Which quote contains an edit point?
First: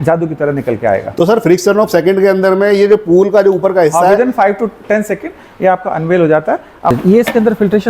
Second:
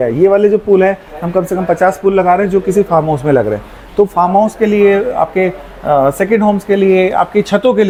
first; 1 cut; at 6.9 s

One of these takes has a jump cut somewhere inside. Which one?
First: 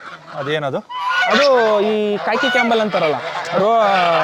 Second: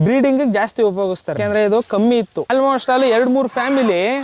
second; 2 cuts; at 1.4 s, 2.5 s

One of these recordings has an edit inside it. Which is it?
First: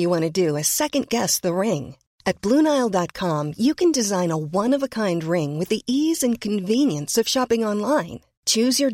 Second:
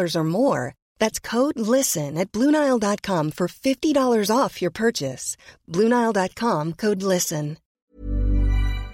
second; 1 cut; at 7.8 s

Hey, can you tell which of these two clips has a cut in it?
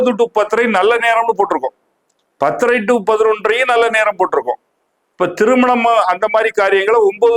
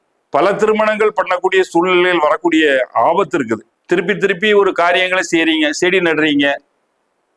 second; 1 cut; at 3.7 s

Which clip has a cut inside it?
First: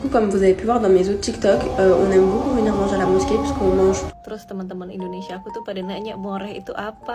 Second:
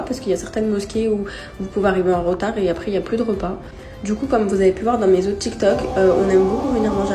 first; 1 cut; at 4.1 s

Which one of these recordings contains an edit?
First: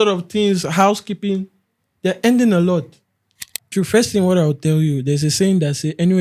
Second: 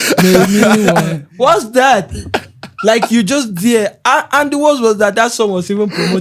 first; 1 cut; at 3.7 s

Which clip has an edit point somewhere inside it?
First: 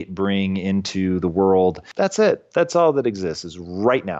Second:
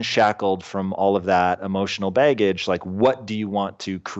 first; 1 cut; at 1.8 s

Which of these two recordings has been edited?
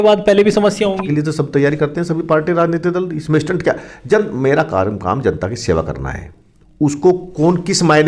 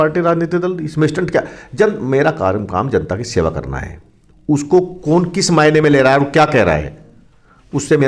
first; 1 cut; at 1.1 s

